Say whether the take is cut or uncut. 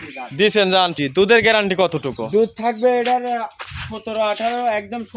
cut